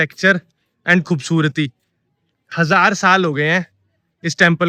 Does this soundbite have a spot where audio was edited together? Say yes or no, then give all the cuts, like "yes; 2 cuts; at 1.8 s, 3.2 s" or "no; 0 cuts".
no; 0 cuts